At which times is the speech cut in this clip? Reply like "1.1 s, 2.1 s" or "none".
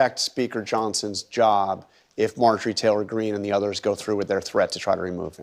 none